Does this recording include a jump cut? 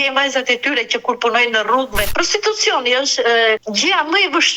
yes; 2 cuts; at 2.1 s, 3.6 s

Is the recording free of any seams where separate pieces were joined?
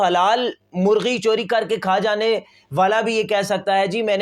yes; 0 cuts

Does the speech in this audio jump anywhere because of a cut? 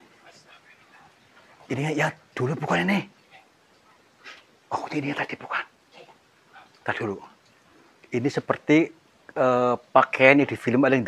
no; 0 cuts

